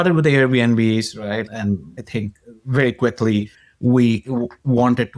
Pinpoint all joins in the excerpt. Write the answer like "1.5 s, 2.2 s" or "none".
1.5 s

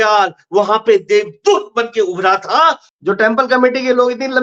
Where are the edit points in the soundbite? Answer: 2.9 s

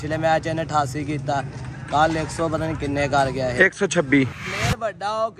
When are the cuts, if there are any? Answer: 4.4 s

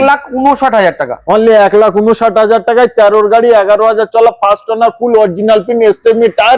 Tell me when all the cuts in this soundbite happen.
none

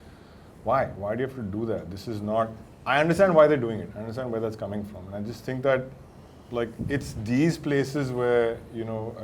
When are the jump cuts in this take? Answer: none

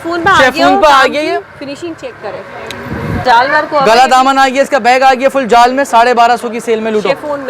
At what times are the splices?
3.2 s

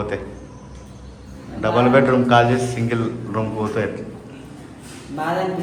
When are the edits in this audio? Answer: none

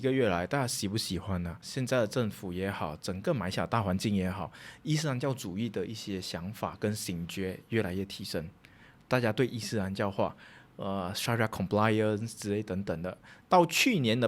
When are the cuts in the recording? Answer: 1.6 s

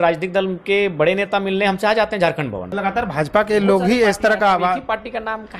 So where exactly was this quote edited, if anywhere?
2.7 s

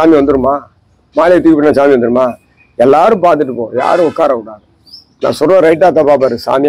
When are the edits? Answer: none

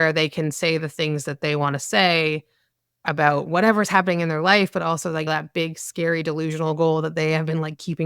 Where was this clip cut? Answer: 5.3 s

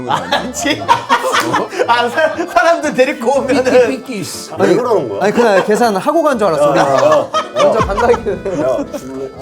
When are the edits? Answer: 4.4 s

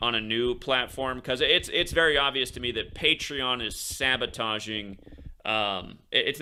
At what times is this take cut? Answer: none

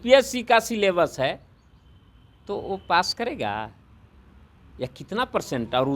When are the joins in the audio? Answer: none

